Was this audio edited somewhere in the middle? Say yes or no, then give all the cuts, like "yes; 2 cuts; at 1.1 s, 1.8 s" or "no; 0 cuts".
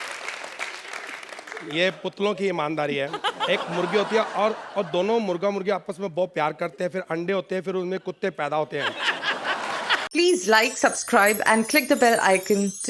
yes; 1 cut; at 10.0 s